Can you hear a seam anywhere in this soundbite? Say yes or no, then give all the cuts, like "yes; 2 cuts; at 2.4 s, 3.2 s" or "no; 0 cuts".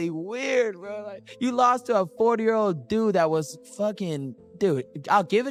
no; 0 cuts